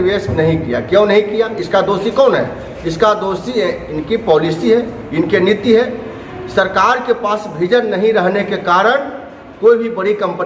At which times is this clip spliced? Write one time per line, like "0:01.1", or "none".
none